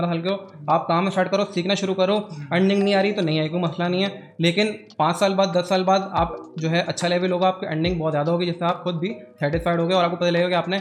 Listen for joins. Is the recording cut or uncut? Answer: uncut